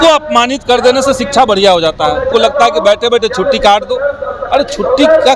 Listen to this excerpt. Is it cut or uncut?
cut